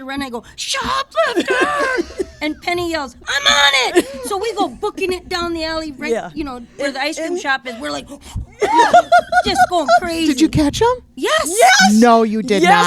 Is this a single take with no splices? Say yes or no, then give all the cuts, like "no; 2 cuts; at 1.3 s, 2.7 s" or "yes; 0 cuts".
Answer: yes; 0 cuts